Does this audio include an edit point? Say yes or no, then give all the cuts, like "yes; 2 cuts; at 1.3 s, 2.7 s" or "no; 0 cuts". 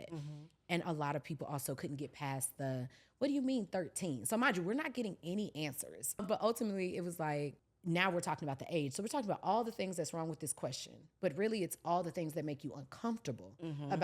yes; 2 cuts; at 6.2 s, 7.7 s